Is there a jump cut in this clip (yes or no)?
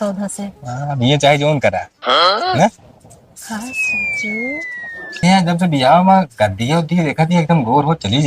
yes